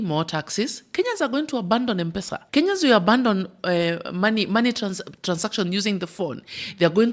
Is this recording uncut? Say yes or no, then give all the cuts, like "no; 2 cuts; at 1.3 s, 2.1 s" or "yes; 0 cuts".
yes; 0 cuts